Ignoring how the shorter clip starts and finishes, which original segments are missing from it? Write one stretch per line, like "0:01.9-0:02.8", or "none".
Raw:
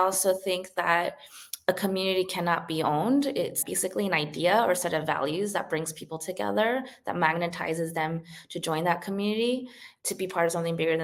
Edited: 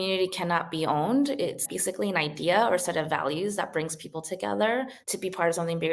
0:06.9-0:10.0